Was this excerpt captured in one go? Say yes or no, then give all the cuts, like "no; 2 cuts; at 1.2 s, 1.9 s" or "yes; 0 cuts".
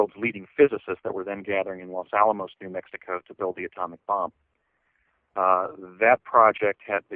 yes; 0 cuts